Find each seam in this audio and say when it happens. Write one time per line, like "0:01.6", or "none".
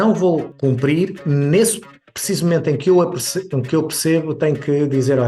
0:01.0